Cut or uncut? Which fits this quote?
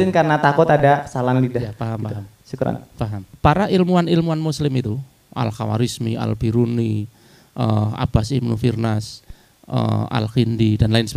cut